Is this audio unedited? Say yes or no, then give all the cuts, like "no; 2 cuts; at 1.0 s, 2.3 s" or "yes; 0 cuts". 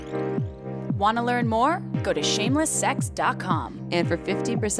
no; 1 cut; at 1.0 s